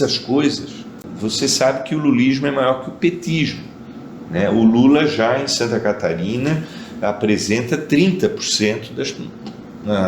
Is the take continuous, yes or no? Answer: no